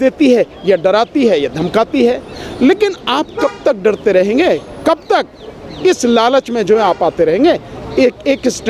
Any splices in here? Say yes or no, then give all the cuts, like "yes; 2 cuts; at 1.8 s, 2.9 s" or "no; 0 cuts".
no; 0 cuts